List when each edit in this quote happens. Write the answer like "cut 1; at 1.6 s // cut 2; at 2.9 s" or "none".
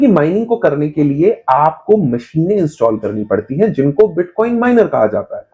none